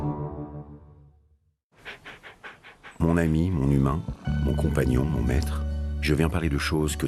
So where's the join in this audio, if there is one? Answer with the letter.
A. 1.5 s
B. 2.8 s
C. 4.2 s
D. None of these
D